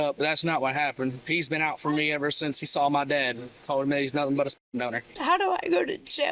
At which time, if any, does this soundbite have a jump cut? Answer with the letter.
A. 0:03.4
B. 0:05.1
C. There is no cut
B